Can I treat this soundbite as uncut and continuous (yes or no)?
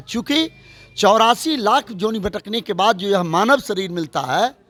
yes